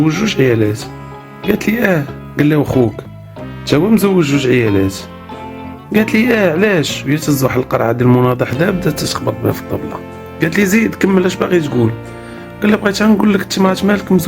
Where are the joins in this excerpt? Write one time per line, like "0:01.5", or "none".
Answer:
0:02.2